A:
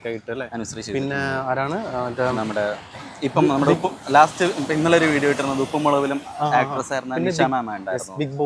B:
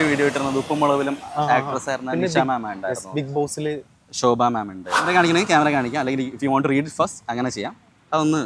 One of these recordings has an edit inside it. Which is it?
B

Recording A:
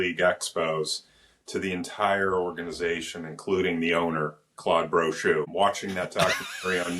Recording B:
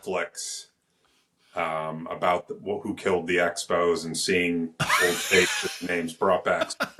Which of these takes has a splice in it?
A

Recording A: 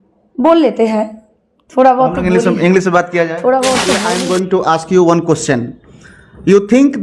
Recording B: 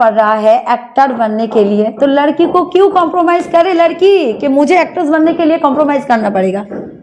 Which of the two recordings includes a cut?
A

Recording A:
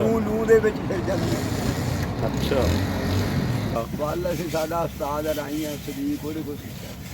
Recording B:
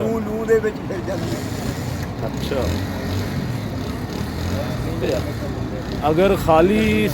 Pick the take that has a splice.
A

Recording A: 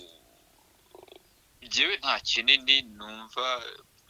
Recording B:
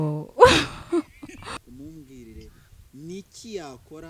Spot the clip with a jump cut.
B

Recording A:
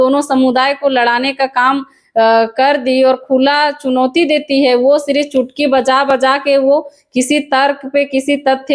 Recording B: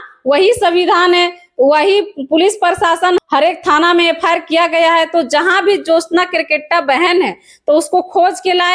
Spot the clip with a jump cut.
B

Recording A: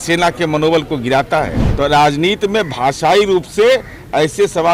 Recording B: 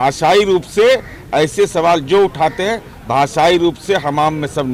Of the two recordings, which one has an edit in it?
A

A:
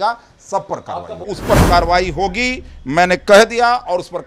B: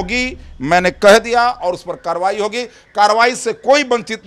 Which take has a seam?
A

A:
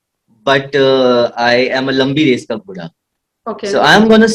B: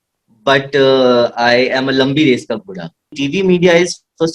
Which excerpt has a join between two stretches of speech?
B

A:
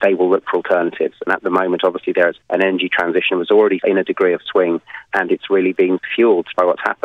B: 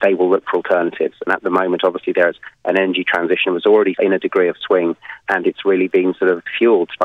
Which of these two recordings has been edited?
A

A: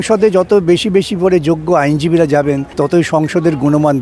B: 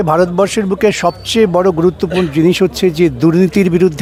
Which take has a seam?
A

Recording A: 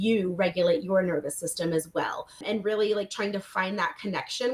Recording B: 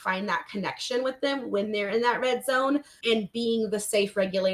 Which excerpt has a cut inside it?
A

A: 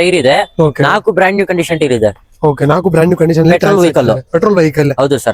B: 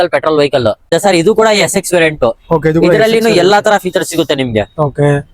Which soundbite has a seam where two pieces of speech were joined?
B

